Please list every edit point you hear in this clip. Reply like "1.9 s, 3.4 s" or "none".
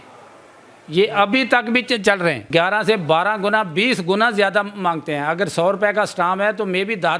2.4 s